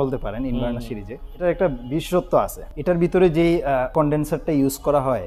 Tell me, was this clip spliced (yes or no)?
yes